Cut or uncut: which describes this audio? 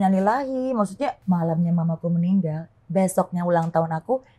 cut